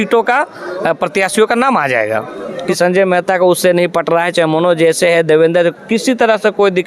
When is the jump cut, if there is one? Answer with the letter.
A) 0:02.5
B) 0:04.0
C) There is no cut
A